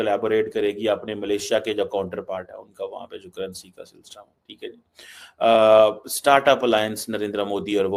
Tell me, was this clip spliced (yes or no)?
no